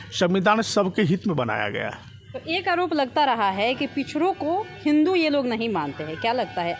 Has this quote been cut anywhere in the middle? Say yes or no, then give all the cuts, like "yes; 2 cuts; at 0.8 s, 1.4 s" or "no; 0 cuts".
no; 0 cuts